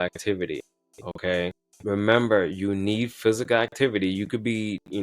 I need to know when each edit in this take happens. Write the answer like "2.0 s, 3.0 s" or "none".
1.7 s